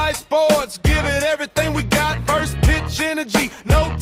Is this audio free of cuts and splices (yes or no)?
yes